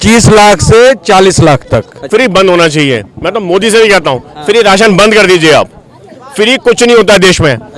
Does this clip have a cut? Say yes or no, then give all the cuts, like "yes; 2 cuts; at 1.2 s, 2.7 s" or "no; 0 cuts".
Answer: yes; 1 cut; at 2.1 s